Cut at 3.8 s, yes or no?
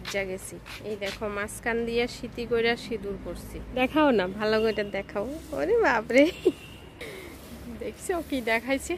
yes